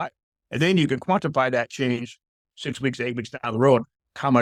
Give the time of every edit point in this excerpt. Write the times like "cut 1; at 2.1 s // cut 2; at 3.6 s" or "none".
none